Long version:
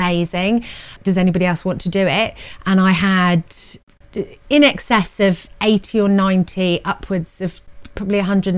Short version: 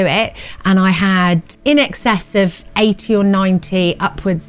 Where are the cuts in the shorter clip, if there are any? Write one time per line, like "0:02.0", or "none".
0:01.5